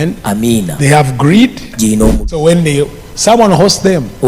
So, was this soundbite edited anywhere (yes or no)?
yes